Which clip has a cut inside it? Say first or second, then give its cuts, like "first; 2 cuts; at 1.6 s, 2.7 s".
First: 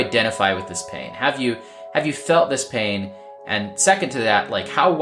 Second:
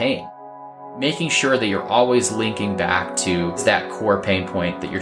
second; 2 cuts; at 0.8 s, 3.6 s